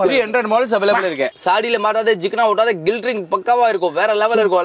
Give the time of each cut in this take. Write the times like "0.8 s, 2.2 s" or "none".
1.3 s